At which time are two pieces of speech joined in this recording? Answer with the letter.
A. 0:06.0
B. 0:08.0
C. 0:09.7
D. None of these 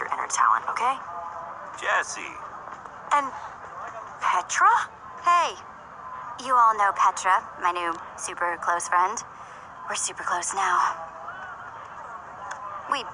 A